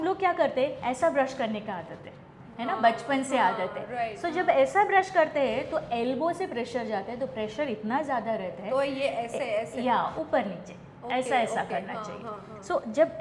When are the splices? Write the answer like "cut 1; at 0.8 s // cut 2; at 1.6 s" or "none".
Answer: none